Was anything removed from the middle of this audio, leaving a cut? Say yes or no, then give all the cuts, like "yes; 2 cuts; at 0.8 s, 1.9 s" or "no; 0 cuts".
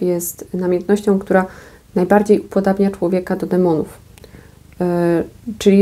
no; 0 cuts